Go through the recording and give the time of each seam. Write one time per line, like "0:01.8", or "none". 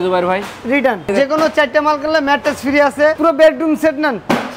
0:01.1
0:03.2